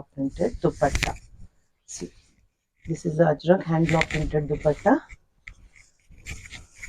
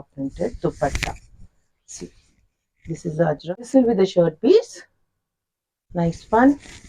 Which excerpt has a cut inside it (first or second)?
second